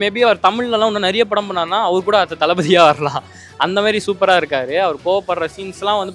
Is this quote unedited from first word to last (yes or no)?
yes